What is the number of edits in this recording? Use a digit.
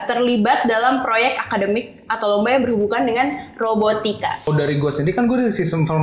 1